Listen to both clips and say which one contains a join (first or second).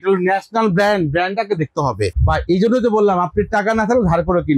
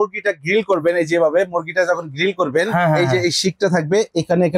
first